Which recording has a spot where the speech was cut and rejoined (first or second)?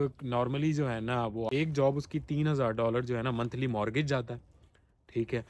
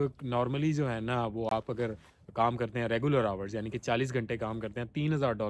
first